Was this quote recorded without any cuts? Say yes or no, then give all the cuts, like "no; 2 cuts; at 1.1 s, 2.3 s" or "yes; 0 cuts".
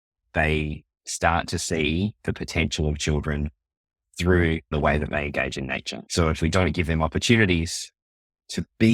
no; 2 cuts; at 4.7 s, 6.0 s